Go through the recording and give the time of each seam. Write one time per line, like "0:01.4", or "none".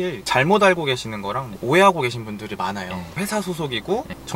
0:03.2